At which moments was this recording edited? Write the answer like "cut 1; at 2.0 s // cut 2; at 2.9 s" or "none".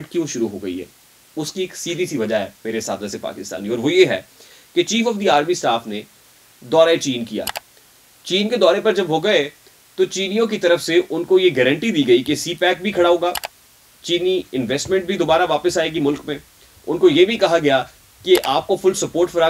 none